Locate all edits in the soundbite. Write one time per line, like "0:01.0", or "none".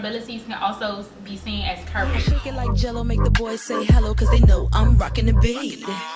0:02.2